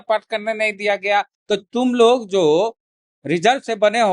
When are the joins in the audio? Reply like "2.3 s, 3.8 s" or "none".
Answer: 1.4 s